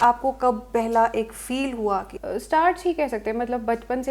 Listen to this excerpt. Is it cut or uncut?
cut